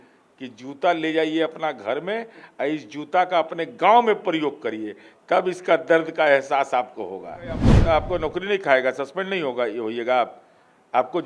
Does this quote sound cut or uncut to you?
cut